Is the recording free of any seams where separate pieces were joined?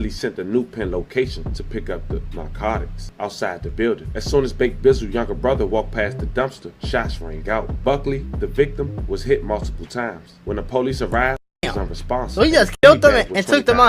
no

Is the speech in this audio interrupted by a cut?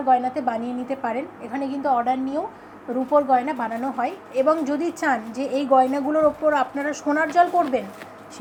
no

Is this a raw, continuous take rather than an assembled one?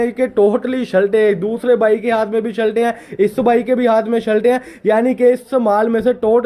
yes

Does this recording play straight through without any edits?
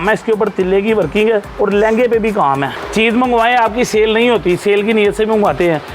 no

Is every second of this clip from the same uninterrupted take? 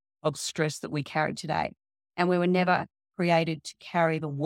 yes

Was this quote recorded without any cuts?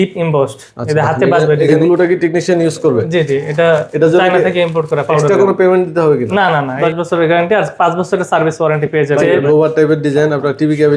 no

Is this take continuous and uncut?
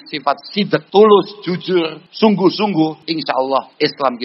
no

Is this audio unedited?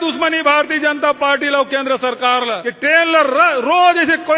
no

